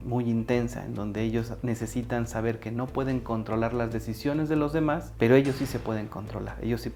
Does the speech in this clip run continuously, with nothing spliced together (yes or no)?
yes